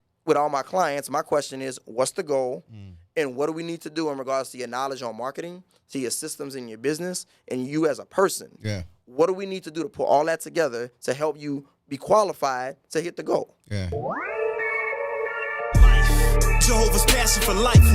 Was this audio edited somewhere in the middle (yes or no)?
yes